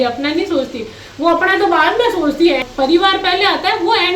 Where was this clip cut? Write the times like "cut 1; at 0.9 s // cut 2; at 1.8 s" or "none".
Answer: cut 1; at 2.6 s